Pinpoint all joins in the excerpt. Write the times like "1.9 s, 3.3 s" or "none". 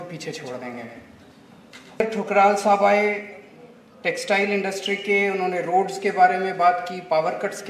2.0 s